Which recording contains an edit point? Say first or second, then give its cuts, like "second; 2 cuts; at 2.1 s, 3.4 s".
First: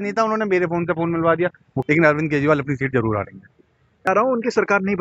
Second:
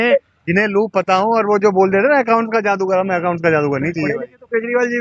first; 2 cuts; at 1.7 s, 4.1 s